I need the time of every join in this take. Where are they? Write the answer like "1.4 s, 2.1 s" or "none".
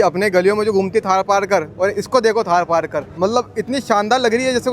3.0 s